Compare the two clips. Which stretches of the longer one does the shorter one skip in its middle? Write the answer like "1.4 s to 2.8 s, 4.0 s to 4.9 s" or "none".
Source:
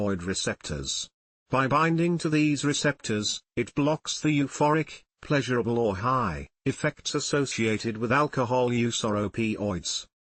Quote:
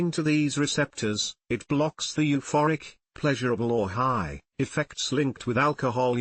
7.3 s to 7.8 s

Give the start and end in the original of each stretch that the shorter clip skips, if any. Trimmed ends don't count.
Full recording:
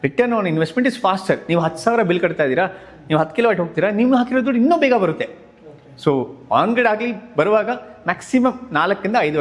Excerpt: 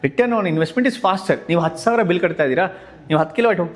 none

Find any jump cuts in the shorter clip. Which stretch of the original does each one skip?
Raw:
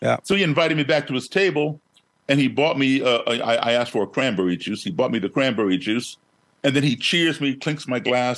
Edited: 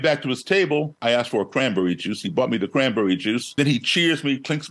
1.9 s to 3.6 s, 6.2 s to 6.7 s

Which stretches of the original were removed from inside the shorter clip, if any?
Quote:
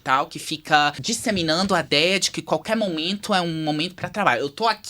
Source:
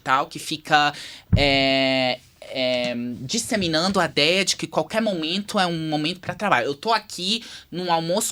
1.0 s to 3.3 s

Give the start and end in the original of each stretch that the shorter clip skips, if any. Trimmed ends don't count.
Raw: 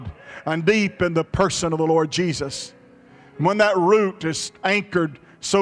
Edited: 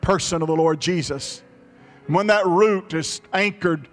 none

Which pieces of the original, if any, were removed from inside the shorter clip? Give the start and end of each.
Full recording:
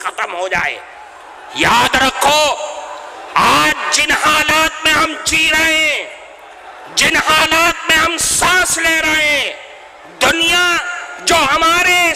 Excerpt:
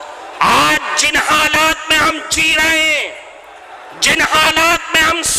none

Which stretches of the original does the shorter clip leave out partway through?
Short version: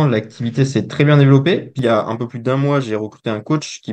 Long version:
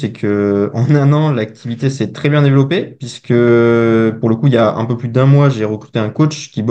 3.0 s to 4.4 s

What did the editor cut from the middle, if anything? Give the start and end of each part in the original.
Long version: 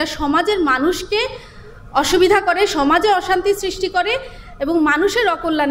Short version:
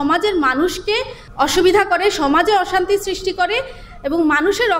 1.4 s to 1.7 s

